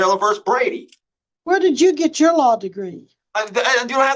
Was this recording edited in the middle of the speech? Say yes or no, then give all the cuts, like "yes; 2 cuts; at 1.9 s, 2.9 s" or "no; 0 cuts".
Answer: no; 0 cuts